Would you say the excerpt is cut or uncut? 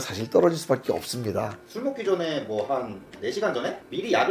cut